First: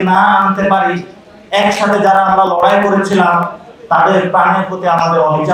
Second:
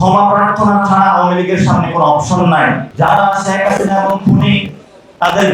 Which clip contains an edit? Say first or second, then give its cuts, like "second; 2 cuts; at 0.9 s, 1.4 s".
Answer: second; 1 cut; at 2.9 s